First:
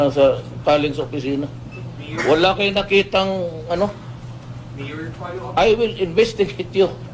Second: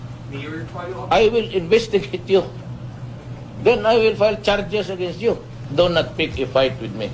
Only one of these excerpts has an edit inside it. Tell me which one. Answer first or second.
second